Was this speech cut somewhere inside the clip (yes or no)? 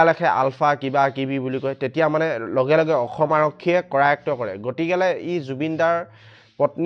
no